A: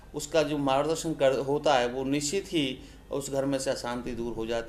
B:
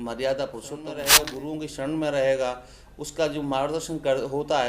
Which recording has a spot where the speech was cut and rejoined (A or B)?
B